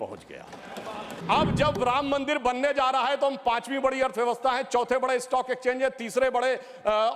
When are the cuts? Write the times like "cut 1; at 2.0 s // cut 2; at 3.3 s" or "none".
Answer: cut 1; at 1.2 s